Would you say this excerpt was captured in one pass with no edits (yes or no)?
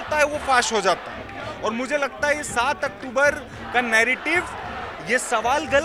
yes